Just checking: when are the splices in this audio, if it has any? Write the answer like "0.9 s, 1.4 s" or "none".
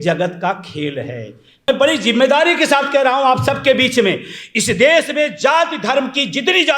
1.5 s